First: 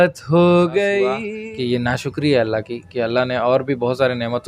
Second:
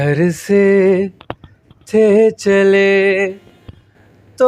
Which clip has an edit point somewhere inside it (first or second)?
first